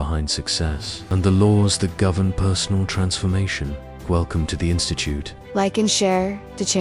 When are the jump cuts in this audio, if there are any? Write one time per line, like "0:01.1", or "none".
0:05.3